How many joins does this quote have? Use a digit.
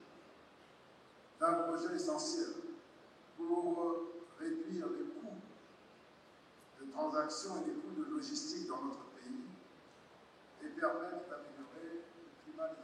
0